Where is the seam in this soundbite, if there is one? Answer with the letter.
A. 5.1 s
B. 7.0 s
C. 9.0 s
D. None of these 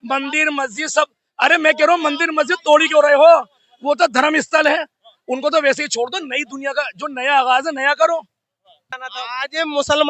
C